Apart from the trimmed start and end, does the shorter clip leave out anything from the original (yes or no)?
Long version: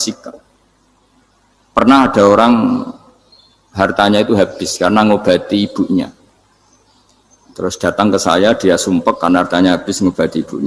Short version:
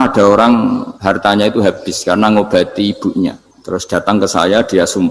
yes